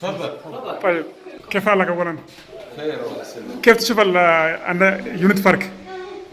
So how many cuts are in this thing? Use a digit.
0